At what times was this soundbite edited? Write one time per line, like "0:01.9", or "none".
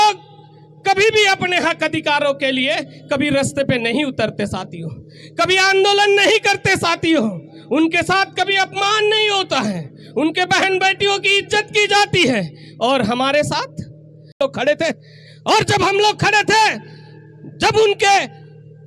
0:14.3